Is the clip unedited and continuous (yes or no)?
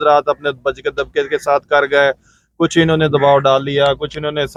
yes